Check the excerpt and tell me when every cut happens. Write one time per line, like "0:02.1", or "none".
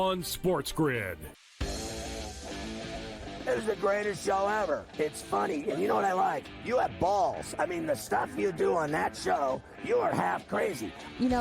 0:01.1